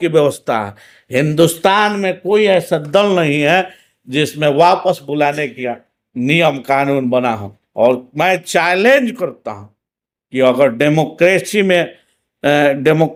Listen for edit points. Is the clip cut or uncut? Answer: uncut